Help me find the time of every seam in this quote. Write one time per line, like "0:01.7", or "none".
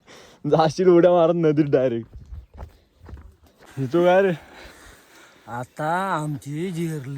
0:03.7